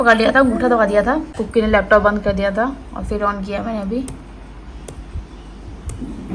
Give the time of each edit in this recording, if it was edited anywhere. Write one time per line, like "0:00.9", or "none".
0:01.3